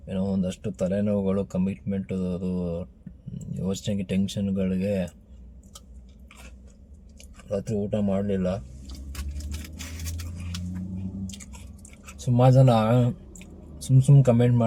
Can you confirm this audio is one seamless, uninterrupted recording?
yes; 0 cuts

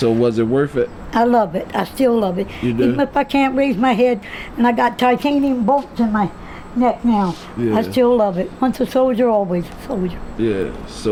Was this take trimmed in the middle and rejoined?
no; 0 cuts

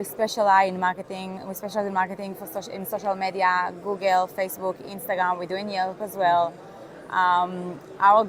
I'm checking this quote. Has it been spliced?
no; 0 cuts

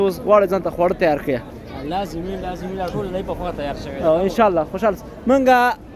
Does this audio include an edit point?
no; 0 cuts

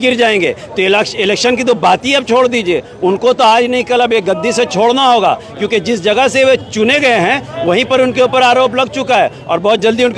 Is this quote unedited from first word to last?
yes; 0 cuts

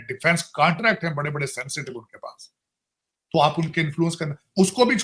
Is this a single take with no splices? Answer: yes; 0 cuts

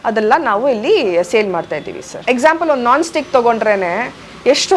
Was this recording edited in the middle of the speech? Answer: yes; 1 cut; at 2.2 s

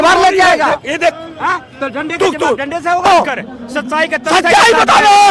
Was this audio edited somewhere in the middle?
yes; 1 cut; at 3.1 s

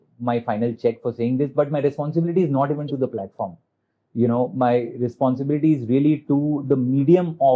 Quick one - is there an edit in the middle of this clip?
no; 0 cuts

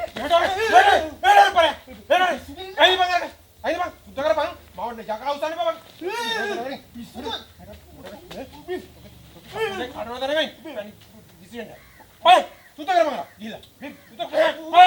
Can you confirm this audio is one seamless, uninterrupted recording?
yes; 0 cuts

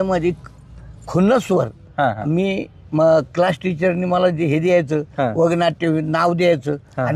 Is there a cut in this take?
no; 0 cuts

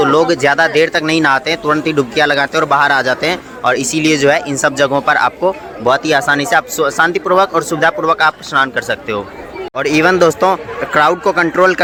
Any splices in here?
no; 0 cuts

